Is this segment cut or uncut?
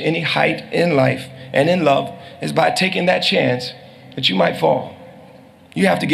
uncut